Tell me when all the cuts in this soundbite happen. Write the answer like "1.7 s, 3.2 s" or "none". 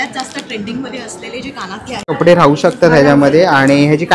2.2 s